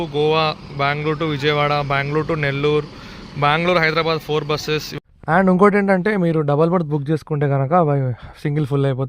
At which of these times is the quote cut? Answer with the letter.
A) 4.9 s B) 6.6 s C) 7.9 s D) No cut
A